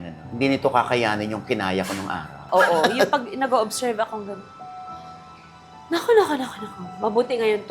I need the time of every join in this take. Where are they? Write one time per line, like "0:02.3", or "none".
0:02.5